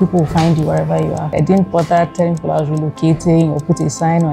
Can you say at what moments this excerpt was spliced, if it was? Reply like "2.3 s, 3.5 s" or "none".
1.3 s